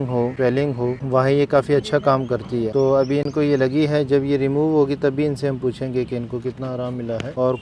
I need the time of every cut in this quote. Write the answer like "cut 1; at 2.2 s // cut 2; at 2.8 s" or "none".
none